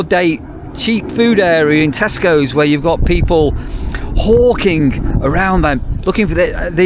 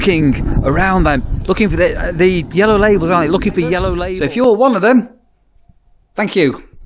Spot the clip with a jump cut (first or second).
second